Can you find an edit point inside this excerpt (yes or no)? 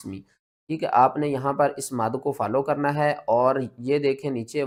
no